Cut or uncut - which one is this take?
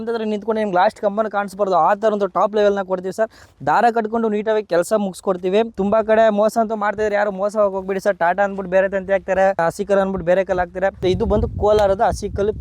cut